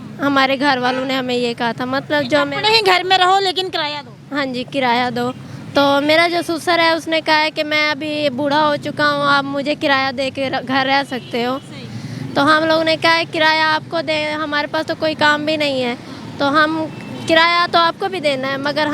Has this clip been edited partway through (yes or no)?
no